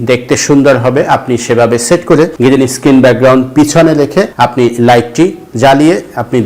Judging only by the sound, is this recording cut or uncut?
cut